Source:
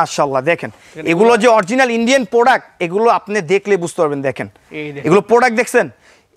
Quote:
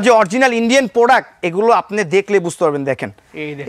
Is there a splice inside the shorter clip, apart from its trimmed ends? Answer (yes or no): no